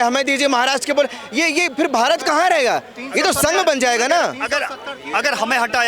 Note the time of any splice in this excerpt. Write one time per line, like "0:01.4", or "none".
none